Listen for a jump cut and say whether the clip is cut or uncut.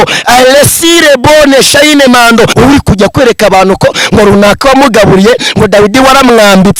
cut